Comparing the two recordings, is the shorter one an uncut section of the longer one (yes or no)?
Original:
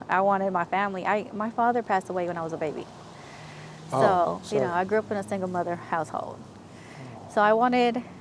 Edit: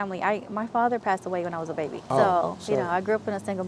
no